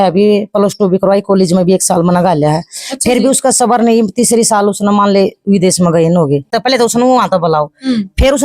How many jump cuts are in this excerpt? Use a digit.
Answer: 1